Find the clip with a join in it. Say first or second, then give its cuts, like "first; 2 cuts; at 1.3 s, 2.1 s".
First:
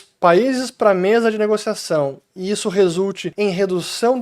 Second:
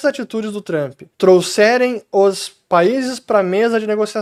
first; 1 cut; at 3.2 s